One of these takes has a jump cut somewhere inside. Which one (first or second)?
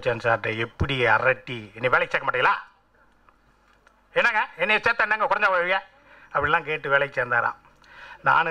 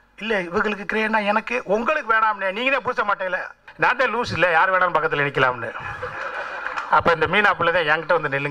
second